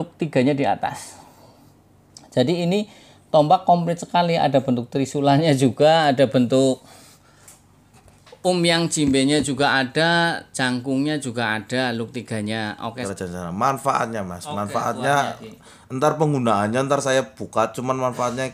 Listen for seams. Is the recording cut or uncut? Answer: cut